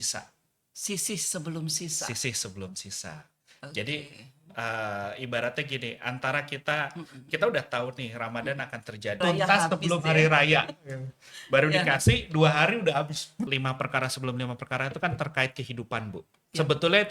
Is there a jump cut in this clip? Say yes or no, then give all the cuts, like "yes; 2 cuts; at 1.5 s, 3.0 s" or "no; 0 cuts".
yes; 2 cuts; at 9.2 s, 13.5 s